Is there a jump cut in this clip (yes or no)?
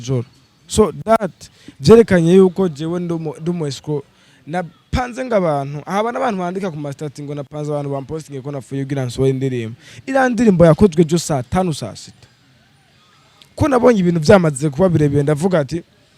no